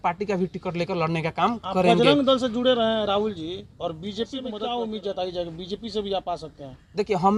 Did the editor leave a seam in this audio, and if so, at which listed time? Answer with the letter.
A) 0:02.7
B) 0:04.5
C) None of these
B